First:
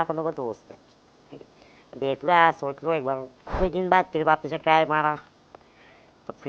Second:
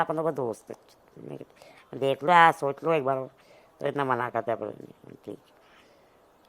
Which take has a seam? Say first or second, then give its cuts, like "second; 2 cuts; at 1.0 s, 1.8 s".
first; 1 cut; at 3.6 s